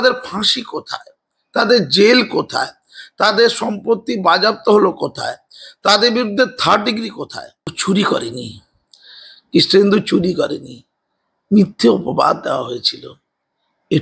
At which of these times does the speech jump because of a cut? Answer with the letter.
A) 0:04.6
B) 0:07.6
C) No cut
B